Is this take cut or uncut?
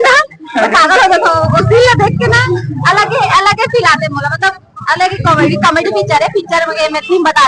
uncut